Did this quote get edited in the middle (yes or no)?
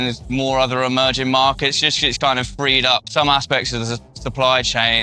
yes